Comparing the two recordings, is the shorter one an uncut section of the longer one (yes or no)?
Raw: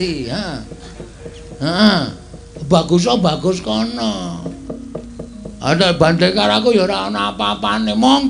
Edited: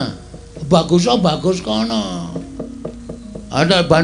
no